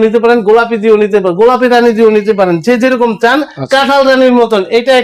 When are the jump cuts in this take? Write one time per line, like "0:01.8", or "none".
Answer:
none